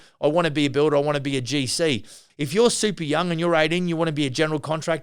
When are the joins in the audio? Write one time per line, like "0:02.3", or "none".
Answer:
0:02.2